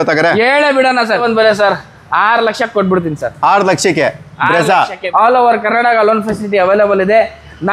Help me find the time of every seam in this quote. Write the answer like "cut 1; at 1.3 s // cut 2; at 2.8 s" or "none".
cut 1; at 1.2 s // cut 2; at 5.0 s